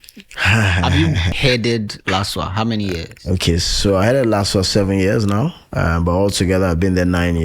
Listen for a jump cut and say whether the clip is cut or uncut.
cut